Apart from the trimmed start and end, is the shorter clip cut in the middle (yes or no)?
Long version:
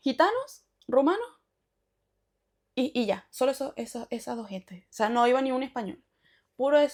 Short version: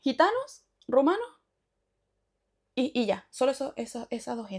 no